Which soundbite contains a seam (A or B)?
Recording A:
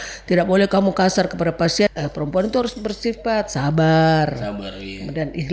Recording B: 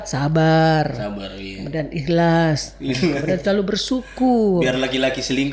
A